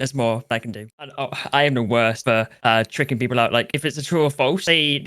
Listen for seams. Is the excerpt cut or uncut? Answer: cut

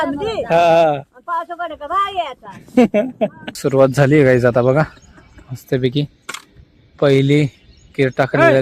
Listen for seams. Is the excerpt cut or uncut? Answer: cut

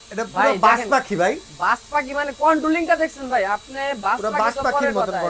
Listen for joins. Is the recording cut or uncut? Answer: uncut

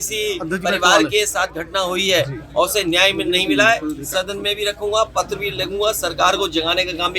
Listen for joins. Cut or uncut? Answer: uncut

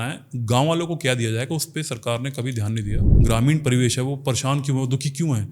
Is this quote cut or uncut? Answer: cut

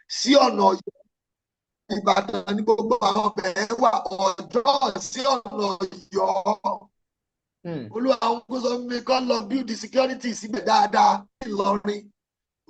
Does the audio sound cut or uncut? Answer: cut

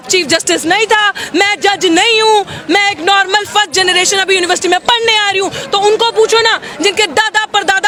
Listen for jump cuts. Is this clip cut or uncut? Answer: uncut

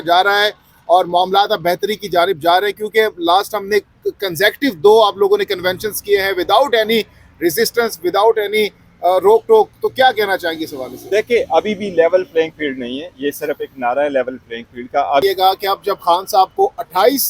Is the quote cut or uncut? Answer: cut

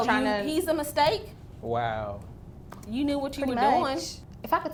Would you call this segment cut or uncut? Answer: uncut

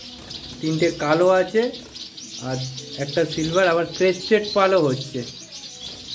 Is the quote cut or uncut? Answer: uncut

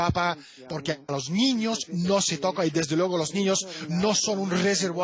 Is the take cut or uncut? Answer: uncut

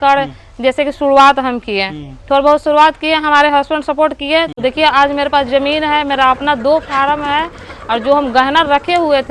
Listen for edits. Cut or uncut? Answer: uncut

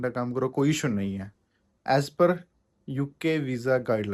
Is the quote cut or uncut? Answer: uncut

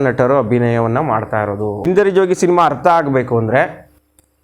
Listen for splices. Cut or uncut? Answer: cut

